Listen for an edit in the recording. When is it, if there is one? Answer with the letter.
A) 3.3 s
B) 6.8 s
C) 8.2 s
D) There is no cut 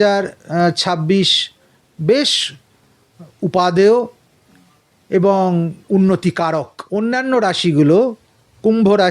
B